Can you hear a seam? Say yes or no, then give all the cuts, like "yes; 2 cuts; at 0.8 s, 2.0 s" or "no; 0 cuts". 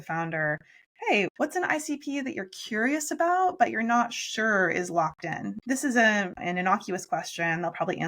yes; 2 cuts; at 1.3 s, 5.6 s